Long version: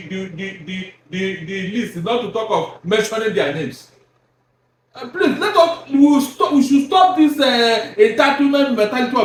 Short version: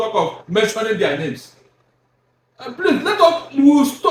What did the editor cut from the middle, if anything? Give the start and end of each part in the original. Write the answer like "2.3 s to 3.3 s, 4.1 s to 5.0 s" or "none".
none